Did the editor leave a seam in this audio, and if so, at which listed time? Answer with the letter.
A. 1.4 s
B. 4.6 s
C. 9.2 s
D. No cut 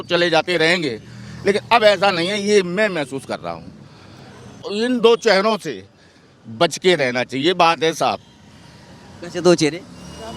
B